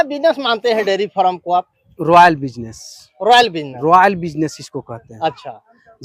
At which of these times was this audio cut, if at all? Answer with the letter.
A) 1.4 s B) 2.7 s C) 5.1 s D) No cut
D